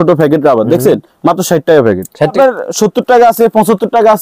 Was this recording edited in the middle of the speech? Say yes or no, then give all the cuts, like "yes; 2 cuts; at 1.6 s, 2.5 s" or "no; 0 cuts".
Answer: yes; 1 cut; at 2.3 s